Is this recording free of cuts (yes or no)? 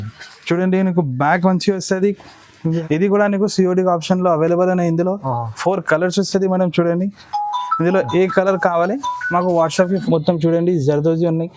no